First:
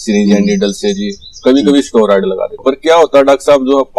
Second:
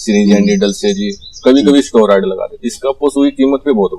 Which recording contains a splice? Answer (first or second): second